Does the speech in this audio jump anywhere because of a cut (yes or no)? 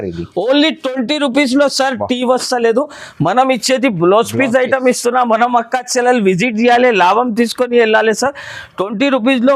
no